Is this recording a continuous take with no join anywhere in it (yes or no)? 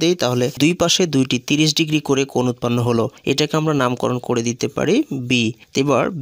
yes